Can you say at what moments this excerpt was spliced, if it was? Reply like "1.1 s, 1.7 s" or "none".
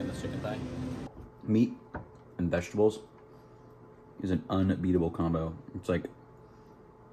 1.1 s